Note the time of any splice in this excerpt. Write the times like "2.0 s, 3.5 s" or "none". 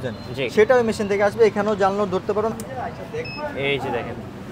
2.5 s